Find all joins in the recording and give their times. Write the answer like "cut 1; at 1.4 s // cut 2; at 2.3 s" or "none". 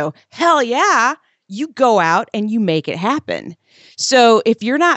none